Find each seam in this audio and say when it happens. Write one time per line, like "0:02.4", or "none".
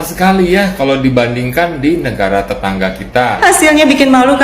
0:03.4